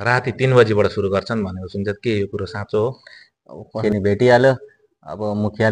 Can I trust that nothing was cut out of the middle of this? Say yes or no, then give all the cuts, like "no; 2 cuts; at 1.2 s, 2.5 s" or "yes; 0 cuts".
no; 1 cut; at 3.8 s